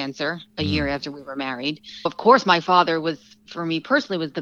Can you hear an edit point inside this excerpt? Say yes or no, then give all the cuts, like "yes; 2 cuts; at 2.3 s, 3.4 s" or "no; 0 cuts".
yes; 1 cut; at 2.1 s